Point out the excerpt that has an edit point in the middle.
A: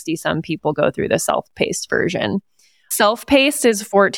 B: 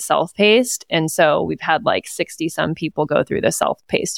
A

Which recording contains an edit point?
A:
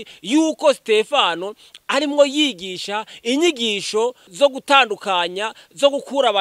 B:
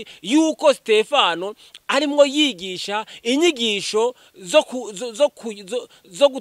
A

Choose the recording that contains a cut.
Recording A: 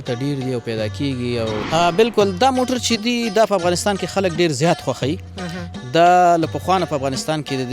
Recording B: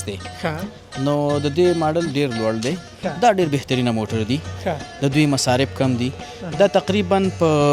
A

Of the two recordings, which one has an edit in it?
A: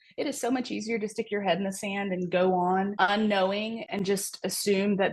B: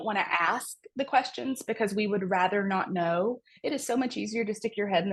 A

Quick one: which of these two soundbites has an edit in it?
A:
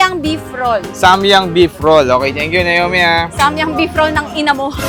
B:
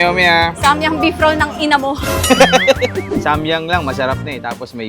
B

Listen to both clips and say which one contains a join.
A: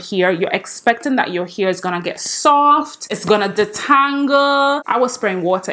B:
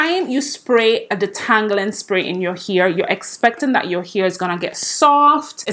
A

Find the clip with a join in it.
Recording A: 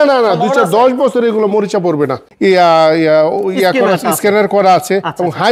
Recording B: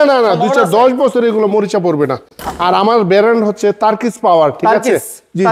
A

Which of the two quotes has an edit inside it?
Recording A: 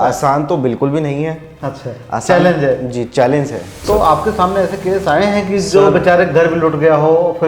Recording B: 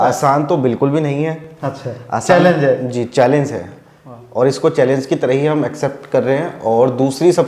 A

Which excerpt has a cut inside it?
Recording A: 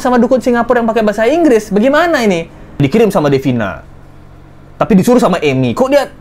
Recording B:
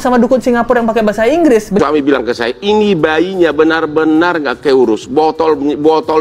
B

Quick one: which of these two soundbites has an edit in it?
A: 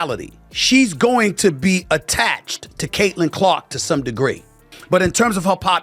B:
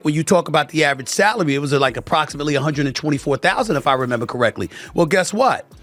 A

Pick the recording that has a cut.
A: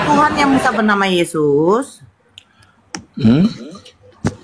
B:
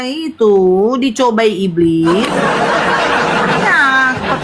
B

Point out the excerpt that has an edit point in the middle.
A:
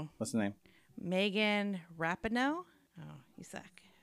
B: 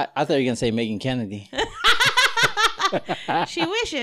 A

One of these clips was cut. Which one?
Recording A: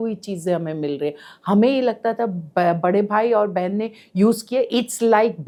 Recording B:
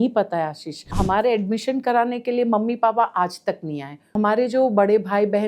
B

